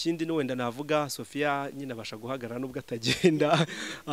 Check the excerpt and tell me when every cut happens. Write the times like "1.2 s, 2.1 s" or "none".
none